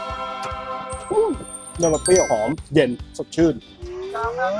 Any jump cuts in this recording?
yes; 1 cut; at 3.6 s

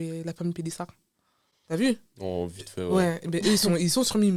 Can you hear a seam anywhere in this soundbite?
no; 0 cuts

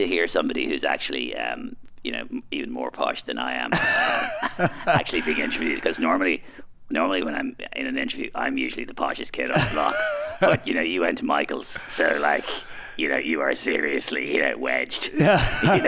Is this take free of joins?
yes; 0 cuts

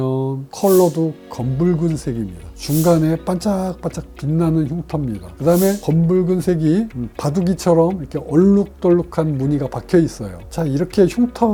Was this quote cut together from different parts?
no; 0 cuts

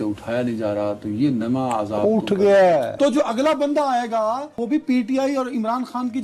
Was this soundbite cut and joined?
yes; 2 cuts; at 3.0 s, 4.5 s

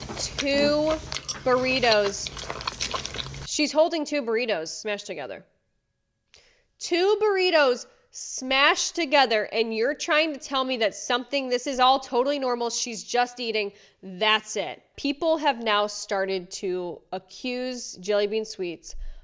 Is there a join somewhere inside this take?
yes; 2 cuts; at 4.7 s, 14.8 s

